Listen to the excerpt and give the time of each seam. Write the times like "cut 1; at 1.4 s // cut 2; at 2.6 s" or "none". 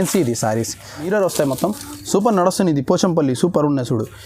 cut 1; at 1.1 s